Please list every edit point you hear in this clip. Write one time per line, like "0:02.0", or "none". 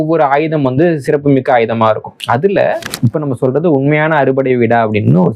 0:02.9